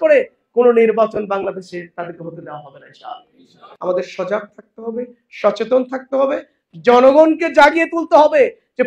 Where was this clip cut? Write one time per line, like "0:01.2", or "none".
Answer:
0:03.6